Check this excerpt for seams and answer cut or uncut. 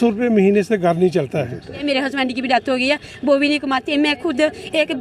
cut